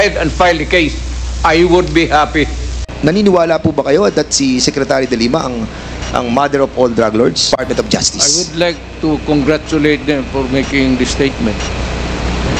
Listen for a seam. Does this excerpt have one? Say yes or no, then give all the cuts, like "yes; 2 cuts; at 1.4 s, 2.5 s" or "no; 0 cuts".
yes; 2 cuts; at 2.9 s, 7.5 s